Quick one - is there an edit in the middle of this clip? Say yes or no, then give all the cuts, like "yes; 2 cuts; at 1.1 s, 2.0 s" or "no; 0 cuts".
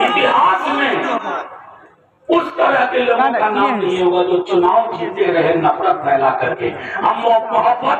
no; 0 cuts